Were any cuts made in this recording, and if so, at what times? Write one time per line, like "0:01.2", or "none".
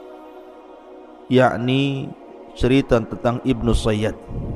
0:01.3